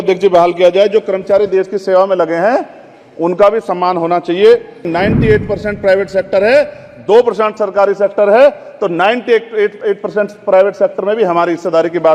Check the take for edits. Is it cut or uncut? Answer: cut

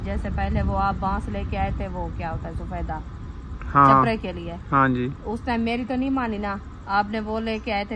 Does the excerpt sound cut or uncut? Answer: uncut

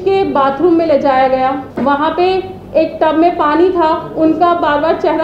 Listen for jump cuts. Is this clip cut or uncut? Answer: cut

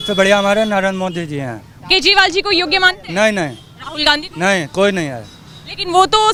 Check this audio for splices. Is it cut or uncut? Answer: uncut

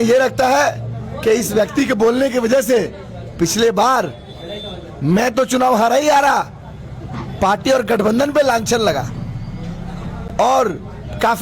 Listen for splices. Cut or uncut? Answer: uncut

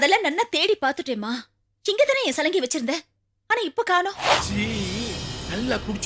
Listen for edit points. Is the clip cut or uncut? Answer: cut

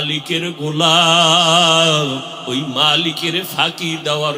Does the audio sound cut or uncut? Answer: cut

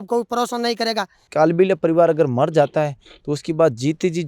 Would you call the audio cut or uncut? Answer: cut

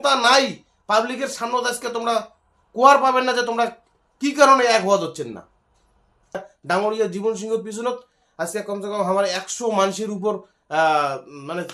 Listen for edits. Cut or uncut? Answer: cut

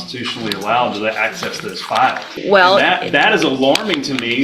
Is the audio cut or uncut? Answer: cut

